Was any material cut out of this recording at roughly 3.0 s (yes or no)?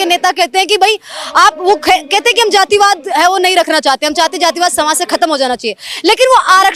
no